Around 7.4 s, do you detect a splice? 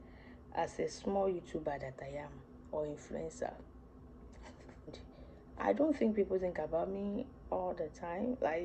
no; 1 cut; at 4.8 s

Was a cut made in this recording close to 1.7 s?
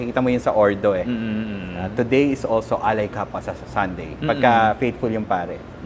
no; 0 cuts

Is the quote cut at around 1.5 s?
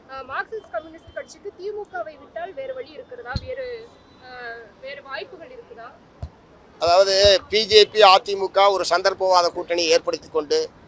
no; 0 cuts

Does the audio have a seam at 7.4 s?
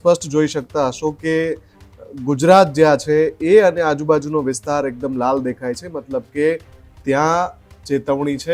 no; 0 cuts

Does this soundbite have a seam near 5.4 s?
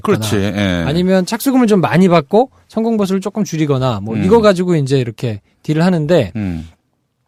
no; 0 cuts

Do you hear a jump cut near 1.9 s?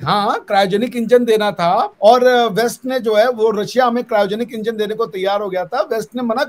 yes; 1 cut; at 1.9 s

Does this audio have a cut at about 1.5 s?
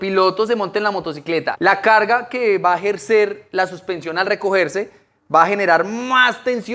yes; 1 cut; at 1.5 s

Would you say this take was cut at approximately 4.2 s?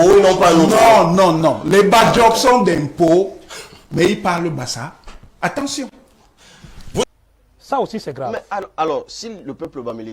no; 1 cut; at 7.0 s

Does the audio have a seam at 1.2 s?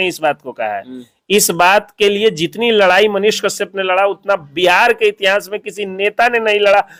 no; 0 cuts

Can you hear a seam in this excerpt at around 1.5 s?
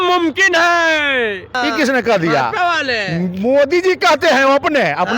yes; 1 cut; at 1.5 s

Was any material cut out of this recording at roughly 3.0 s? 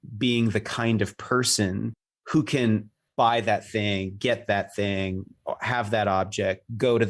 yes; 1 cut; at 3.0 s

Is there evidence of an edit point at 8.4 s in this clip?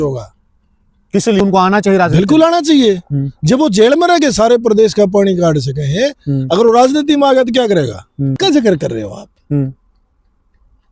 yes; 2 cuts; at 1.4 s, 8.4 s

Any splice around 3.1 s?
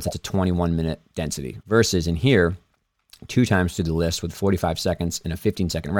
no; 1 cut; at 1.5 s

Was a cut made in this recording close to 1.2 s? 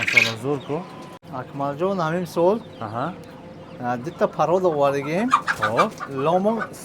yes; 1 cut; at 1.2 s

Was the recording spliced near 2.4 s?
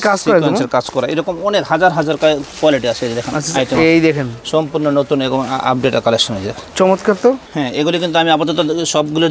no; 0 cuts

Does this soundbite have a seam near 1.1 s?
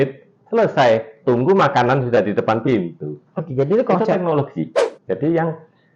no; 1 cut; at 4.8 s

